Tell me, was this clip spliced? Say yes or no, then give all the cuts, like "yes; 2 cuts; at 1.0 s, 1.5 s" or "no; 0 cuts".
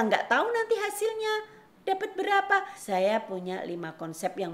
yes; 1 cut; at 2.8 s